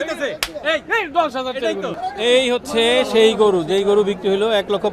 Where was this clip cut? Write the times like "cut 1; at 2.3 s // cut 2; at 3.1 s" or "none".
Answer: cut 1; at 1.9 s

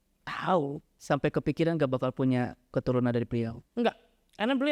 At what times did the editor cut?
cut 1; at 0.9 s // cut 2; at 3.6 s

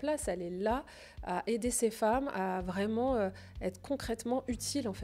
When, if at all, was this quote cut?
none

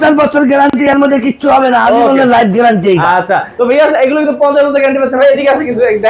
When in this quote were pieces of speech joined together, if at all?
none

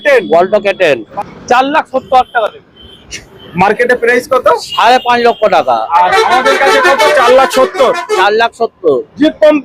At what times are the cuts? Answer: cut 1; at 1.1 s

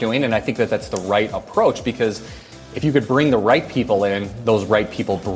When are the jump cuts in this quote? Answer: none

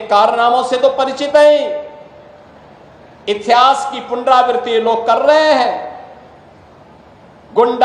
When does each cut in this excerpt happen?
none

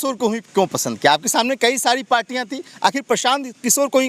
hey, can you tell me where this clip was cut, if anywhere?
none

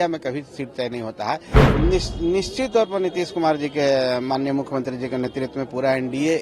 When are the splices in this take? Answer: cut 1; at 1.6 s

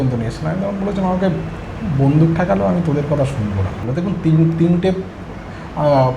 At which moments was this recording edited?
cut 1; at 3.8 s

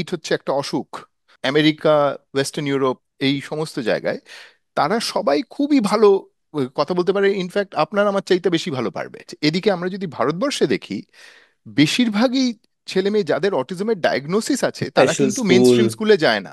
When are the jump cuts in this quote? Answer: cut 1; at 1.3 s // cut 2; at 9.3 s

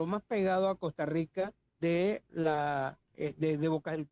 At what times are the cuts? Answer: cut 1; at 1.6 s // cut 2; at 3.0 s

